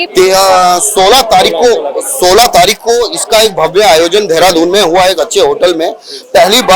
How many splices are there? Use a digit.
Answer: 0